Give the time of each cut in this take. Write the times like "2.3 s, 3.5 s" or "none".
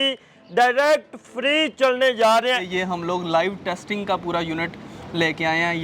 2.7 s